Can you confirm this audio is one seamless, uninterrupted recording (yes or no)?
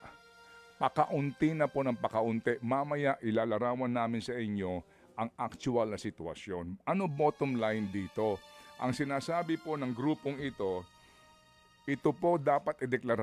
yes